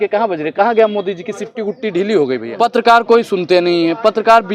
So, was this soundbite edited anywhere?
yes; 1 cut; at 2.5 s

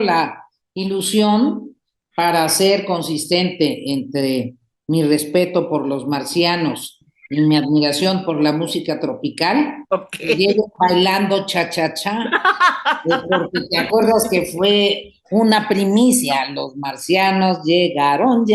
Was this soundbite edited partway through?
no; 0 cuts

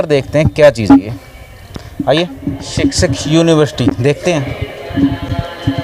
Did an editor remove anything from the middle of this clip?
yes; 1 cut; at 2.6 s

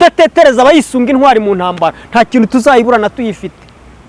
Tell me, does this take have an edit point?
no; 0 cuts

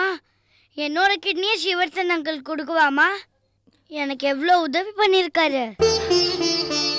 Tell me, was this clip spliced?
no; 0 cuts

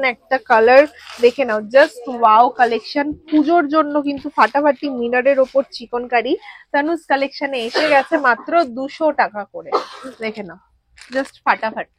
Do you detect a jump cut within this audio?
no; 0 cuts

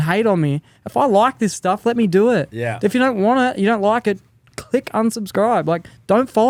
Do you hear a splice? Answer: no; 0 cuts

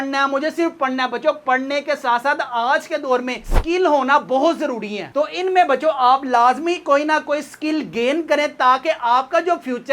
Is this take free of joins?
yes; 0 cuts

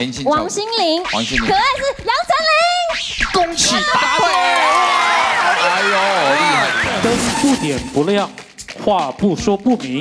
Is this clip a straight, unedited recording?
no; 1 cut; at 6.9 s

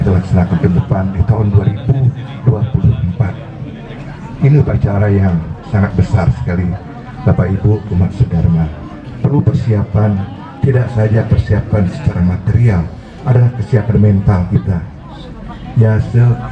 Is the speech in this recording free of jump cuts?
yes; 0 cuts

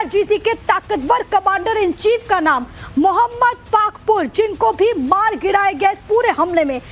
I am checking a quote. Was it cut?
yes; 1 cut; at 2.3 s

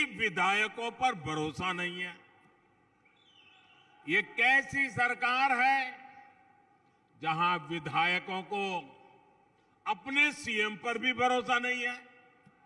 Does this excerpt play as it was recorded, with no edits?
yes; 0 cuts

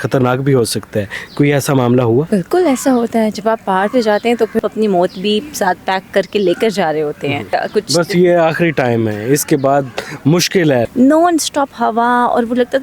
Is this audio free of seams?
no; 3 cuts; at 4.6 s, 7.6 s, 10.9 s

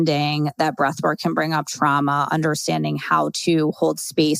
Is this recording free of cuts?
yes; 0 cuts

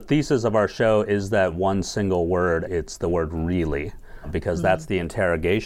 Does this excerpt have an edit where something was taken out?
yes; 1 cut; at 2.7 s

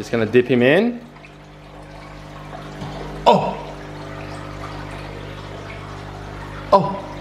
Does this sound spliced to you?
no; 0 cuts

